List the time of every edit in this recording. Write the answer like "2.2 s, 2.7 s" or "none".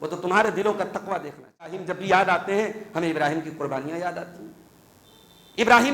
1.9 s